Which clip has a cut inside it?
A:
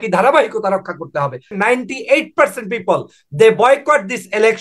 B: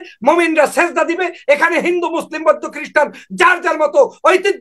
A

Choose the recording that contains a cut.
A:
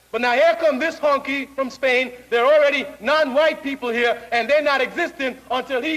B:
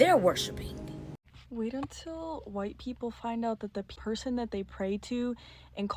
B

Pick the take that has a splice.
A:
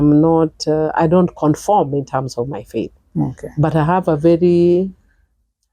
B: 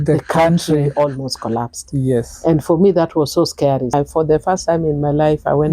B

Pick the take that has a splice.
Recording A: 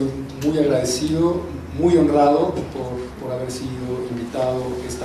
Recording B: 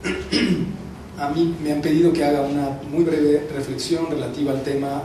A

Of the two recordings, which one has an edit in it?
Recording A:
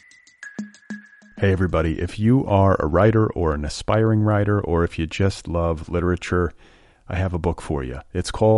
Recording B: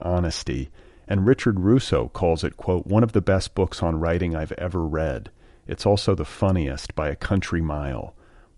A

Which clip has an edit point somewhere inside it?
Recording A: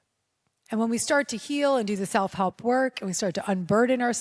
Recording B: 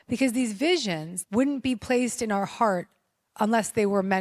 B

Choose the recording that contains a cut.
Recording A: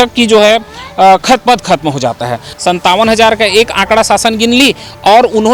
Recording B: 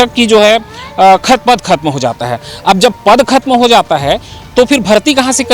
A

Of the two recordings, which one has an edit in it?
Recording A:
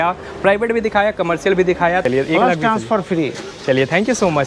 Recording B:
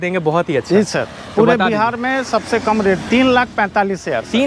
A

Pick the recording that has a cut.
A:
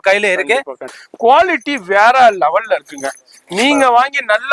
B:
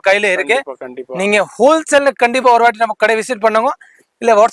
A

